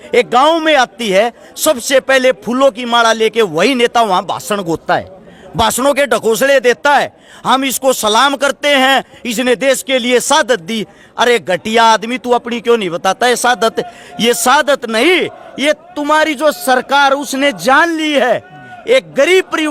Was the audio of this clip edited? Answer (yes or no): no